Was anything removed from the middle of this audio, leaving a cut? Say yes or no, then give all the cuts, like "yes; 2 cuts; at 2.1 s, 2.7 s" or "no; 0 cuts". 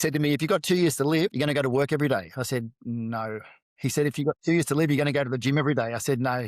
yes; 1 cut; at 1.3 s